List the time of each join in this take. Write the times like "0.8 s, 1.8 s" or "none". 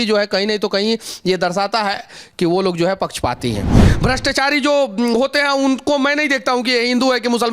3.8 s